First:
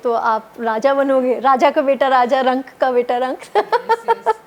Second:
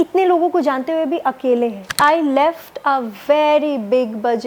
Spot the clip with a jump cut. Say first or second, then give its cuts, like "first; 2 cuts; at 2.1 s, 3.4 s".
second; 1 cut; at 2.0 s